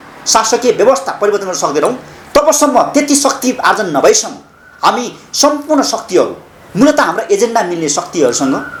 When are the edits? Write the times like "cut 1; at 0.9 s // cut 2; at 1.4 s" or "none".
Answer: none